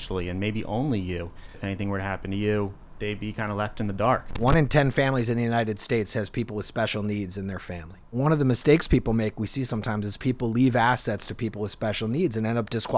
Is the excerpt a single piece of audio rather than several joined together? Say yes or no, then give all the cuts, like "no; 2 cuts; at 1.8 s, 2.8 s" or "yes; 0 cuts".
no; 4 cuts; at 1.6 s, 2.9 s, 4.4 s, 8.1 s